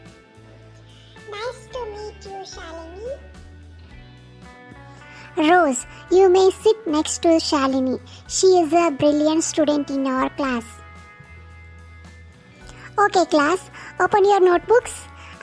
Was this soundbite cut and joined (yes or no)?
yes